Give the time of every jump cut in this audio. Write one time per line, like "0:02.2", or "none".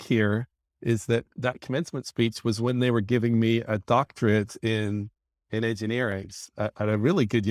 none